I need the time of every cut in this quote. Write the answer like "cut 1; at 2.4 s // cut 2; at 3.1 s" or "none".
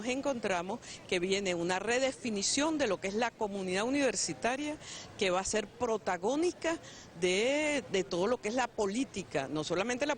cut 1; at 6.8 s